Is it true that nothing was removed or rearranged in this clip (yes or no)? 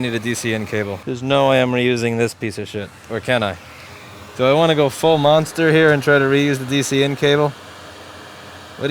no